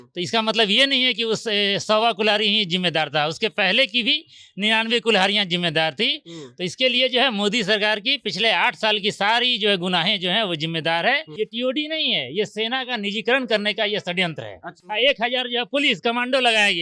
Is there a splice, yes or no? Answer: yes